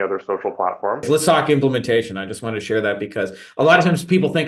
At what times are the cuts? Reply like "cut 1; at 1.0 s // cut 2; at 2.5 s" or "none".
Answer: cut 1; at 1.1 s